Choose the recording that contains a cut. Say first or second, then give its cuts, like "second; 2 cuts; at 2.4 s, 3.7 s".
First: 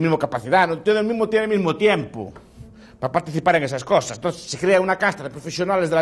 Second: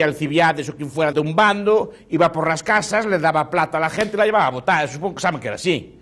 second; 1 cut; at 1.1 s